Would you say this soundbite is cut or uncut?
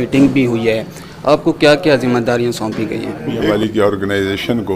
cut